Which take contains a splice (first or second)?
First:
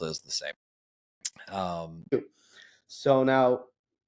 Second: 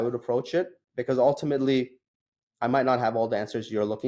first